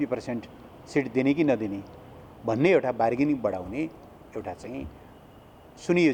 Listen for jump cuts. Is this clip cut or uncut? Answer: uncut